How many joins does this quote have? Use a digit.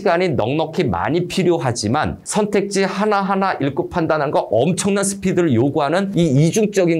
0